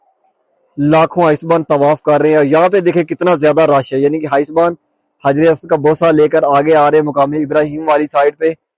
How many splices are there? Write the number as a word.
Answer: zero